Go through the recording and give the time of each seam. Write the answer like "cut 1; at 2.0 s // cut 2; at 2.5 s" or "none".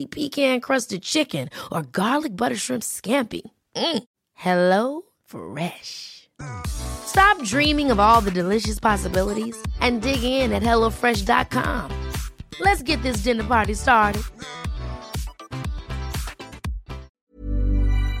cut 1; at 17.1 s